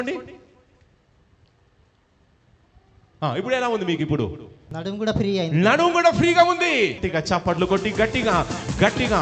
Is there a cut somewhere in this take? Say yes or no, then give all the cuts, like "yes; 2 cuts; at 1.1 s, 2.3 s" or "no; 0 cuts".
yes; 2 cuts; at 4.7 s, 7.0 s